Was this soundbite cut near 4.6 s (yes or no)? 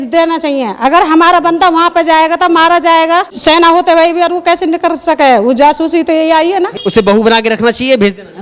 no